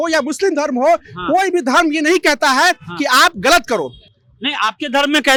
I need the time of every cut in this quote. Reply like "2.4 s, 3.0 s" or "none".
none